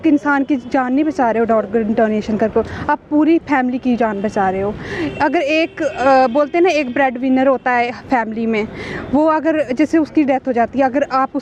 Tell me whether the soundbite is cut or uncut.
uncut